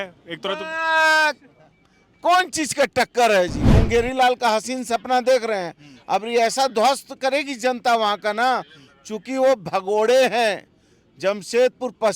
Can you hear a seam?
yes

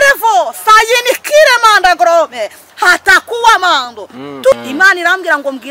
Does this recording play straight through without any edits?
no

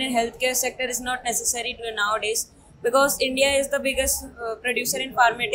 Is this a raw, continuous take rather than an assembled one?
yes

